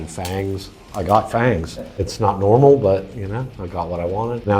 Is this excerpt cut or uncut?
cut